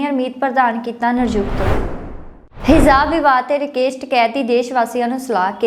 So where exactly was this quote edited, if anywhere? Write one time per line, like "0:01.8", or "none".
0:01.7